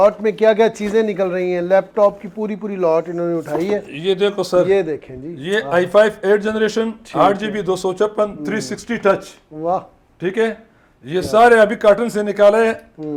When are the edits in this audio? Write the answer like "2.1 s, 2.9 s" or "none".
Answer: none